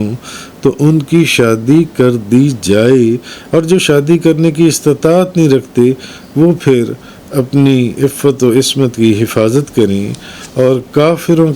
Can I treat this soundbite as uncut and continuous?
yes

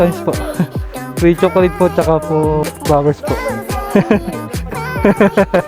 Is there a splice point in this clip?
yes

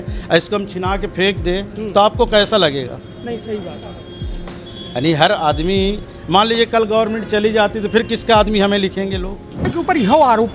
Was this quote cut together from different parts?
yes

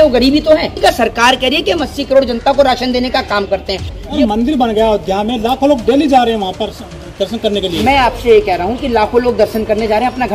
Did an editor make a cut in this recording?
yes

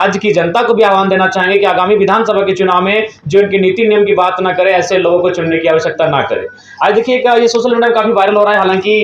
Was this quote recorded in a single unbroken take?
yes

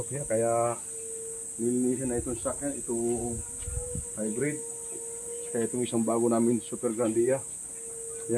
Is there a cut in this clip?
no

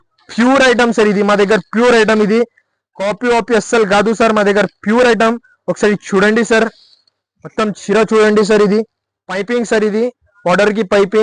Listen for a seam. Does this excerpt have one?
no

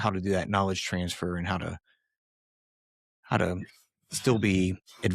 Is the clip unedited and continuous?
yes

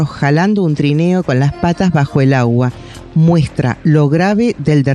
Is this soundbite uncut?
yes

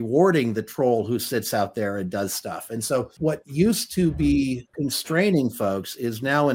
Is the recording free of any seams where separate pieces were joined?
no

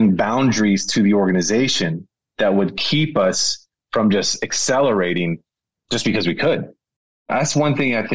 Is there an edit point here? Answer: yes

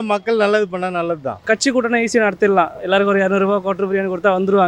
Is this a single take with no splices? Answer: no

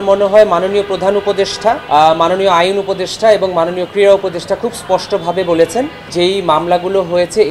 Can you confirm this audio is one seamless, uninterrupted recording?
no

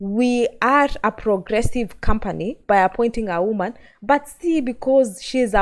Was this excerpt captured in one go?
no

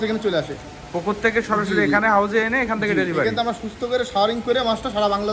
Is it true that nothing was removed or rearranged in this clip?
yes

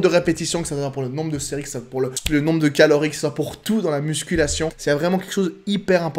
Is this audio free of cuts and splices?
no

